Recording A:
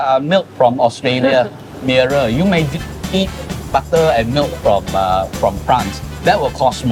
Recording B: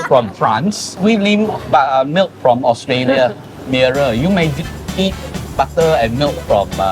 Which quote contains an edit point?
B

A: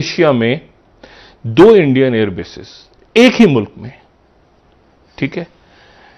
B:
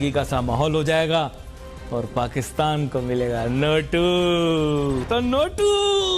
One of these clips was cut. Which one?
B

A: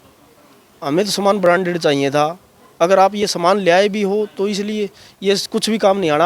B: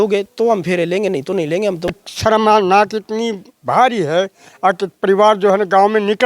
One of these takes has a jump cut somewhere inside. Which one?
B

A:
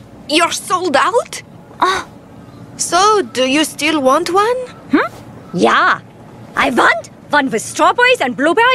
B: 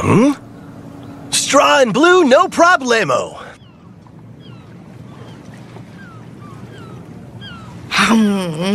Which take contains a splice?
B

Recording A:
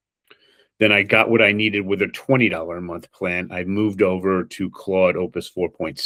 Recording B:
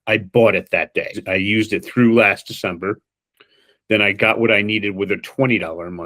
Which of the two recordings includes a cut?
B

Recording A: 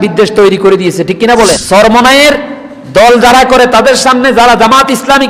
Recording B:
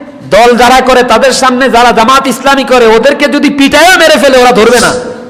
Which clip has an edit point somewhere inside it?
A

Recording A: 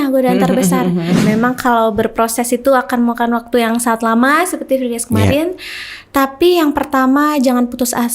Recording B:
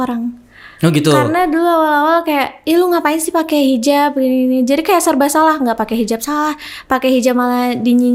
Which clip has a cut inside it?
A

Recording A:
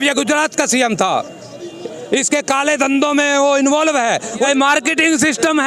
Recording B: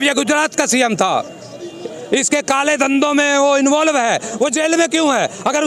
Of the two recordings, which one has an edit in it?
A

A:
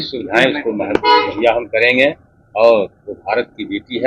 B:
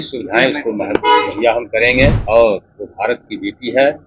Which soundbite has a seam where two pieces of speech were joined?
B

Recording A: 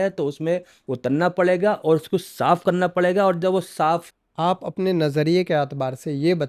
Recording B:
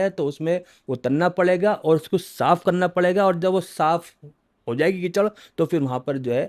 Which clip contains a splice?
A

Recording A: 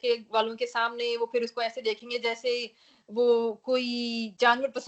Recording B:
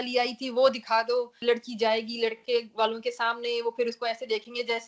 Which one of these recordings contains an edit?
B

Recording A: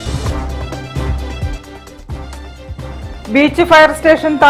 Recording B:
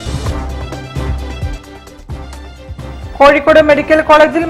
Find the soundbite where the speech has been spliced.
B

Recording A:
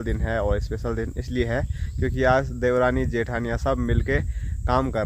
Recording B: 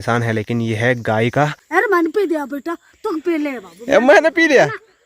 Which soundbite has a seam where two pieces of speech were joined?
B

